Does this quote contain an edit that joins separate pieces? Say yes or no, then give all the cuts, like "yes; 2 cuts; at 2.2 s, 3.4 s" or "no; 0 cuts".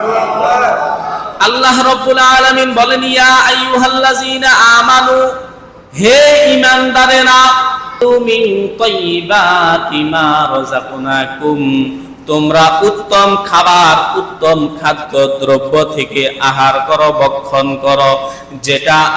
yes; 1 cut; at 8.0 s